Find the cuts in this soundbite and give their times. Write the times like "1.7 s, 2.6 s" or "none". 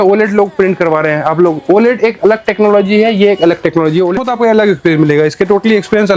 4.1 s